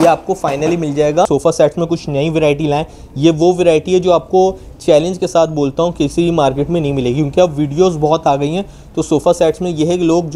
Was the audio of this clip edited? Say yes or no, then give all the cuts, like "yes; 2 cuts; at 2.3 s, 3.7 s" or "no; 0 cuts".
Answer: yes; 1 cut; at 1.3 s